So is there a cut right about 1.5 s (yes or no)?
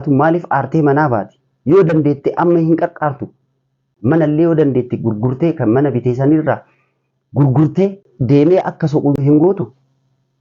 no